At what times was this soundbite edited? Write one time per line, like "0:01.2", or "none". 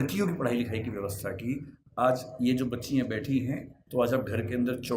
0:03.7